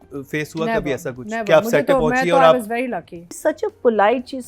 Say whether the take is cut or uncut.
cut